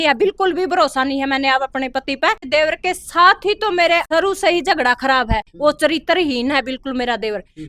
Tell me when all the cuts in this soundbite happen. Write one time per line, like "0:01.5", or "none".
0:02.4
0:04.1